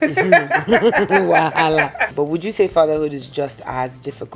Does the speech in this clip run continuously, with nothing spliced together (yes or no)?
no